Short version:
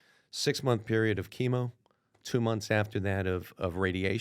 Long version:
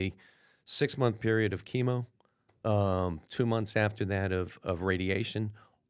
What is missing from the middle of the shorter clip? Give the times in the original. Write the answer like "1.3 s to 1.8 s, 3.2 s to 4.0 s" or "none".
2.5 s to 3.2 s